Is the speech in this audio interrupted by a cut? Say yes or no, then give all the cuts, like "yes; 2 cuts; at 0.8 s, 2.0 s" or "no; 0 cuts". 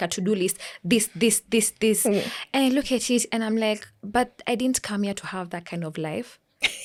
no; 0 cuts